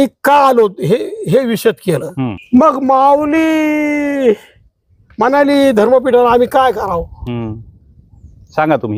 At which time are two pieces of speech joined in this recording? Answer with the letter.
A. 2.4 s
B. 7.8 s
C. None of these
A